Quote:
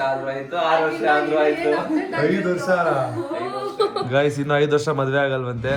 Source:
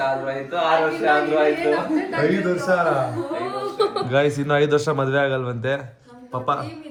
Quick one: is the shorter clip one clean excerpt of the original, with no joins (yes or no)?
yes